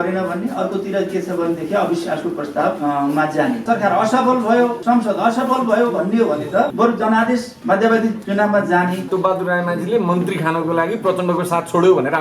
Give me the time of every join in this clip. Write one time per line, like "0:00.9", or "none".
0:02.8
0:03.6
0:04.8
0:06.7
0:07.5
0:08.2
0:09.1